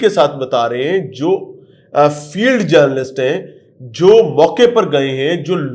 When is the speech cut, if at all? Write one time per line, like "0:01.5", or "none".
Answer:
none